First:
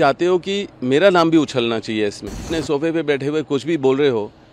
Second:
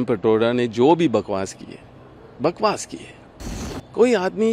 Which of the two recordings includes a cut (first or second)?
first